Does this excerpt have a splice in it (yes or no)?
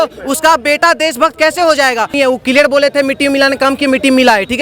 yes